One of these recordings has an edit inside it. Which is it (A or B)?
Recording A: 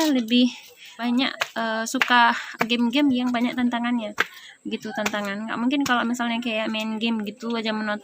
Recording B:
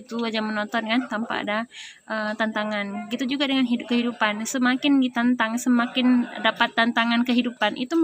A